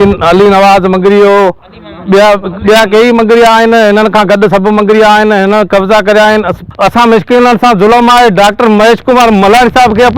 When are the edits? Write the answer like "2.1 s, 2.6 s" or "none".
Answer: 6.6 s